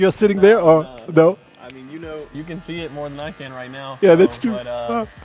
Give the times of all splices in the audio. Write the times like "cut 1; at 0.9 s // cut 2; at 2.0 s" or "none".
none

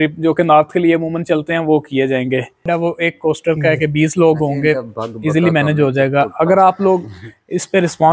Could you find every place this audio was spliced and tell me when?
cut 1; at 2.6 s

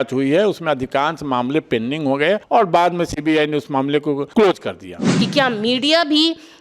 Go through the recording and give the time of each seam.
cut 1; at 2.4 s // cut 2; at 4.2 s // cut 3; at 5.1 s

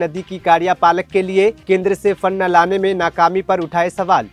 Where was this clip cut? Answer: none

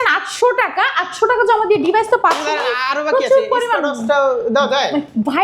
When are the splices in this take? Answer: none

